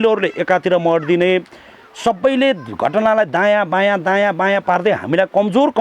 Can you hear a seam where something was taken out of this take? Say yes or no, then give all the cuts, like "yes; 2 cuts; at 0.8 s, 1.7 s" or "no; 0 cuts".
no; 0 cuts